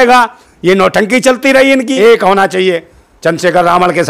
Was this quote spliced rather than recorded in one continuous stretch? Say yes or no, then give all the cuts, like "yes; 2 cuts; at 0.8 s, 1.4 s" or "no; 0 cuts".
yes; 1 cut; at 2.0 s